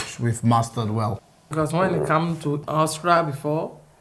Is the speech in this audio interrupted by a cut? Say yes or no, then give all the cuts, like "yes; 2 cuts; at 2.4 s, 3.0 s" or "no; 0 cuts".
yes; 2 cuts; at 1.4 s, 2.6 s